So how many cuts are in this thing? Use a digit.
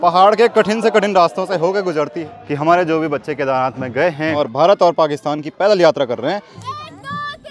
3